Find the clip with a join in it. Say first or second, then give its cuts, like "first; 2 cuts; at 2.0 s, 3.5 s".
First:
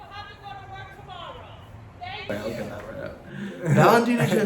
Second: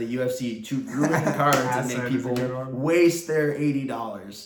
first; 1 cut; at 2.3 s